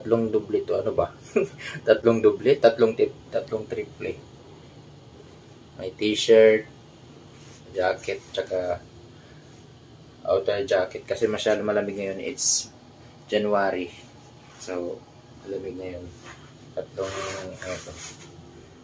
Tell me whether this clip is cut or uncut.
uncut